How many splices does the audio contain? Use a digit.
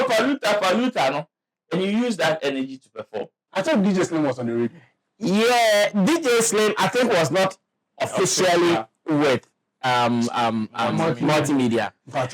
1